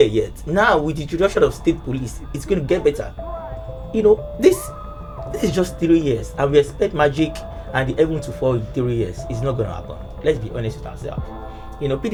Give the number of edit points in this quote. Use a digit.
0